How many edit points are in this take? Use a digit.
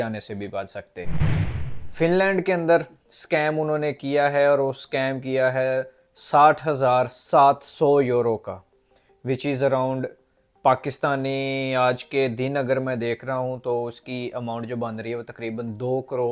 0